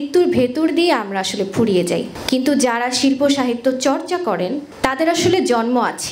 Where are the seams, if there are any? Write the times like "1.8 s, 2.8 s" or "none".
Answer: 2.1 s, 4.7 s